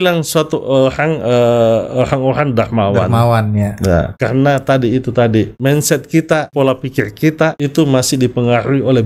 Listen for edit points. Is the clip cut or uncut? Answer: cut